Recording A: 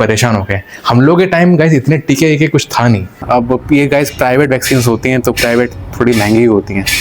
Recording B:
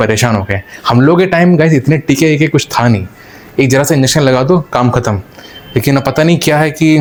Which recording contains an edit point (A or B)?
A